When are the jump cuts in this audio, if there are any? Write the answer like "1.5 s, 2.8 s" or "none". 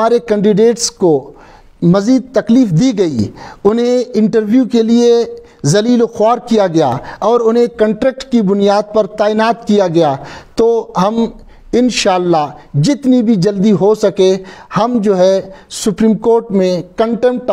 none